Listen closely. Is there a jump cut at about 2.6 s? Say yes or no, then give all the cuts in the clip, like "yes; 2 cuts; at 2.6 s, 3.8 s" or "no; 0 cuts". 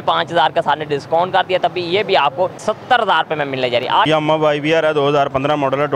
yes; 2 cuts; at 2.6 s, 4.1 s